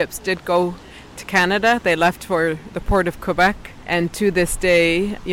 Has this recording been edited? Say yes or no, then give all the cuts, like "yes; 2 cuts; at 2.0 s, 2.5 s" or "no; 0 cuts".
yes; 1 cut; at 3.8 s